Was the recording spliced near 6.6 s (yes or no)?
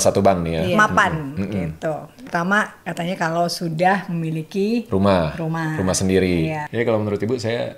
yes